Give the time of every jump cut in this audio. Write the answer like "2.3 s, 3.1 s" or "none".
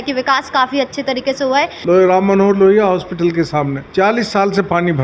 1.8 s, 3.8 s